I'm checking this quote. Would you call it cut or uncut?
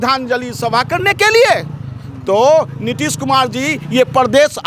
uncut